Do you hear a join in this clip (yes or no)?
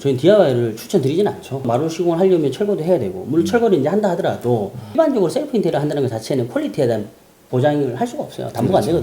yes